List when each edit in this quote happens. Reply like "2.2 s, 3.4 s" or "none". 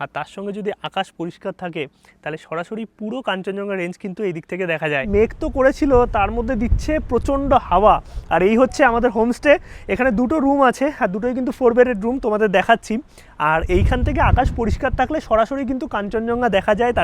5.1 s

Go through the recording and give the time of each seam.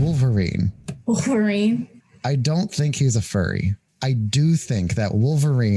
1.9 s, 3.8 s

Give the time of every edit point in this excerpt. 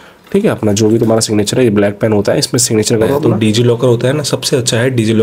3.3 s

